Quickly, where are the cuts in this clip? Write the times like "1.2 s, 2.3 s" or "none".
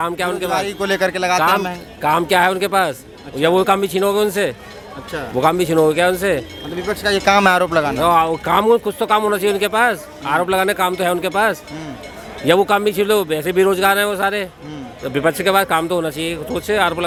none